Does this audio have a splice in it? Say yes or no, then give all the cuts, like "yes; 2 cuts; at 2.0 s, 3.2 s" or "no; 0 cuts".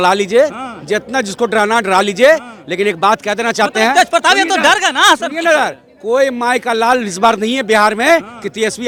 no; 0 cuts